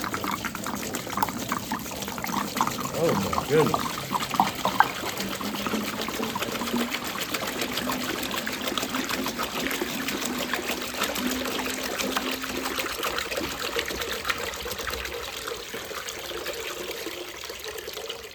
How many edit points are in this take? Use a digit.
0